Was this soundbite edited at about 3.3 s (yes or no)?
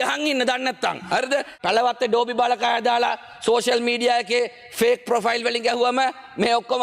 no